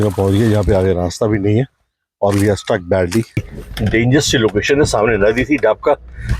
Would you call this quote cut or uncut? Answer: cut